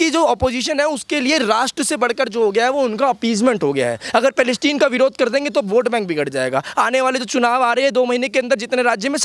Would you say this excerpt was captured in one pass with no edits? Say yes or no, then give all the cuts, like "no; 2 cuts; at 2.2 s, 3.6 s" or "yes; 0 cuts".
yes; 0 cuts